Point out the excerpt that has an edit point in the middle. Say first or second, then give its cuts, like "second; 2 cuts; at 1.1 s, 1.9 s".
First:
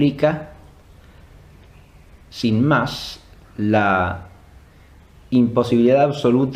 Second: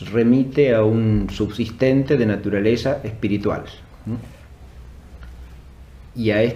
second; 1 cut; at 2.8 s